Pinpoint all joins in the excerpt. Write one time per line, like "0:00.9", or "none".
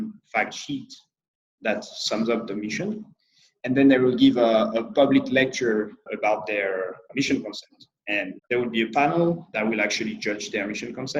0:06.1
0:07.1
0:08.4
0:09.5